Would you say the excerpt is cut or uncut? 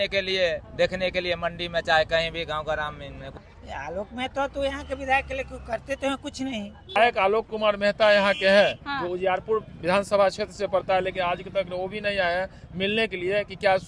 cut